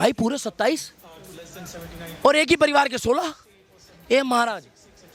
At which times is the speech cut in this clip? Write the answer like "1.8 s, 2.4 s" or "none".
none